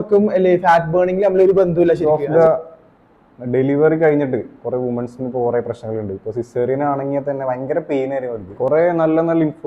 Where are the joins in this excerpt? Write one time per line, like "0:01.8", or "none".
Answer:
0:02.0
0:08.5